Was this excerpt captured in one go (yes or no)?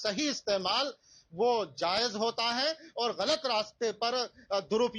yes